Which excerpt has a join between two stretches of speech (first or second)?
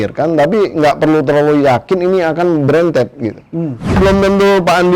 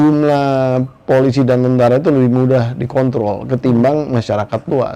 first